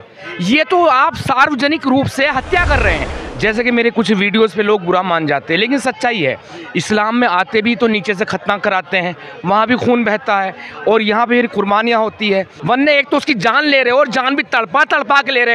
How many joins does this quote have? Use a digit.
2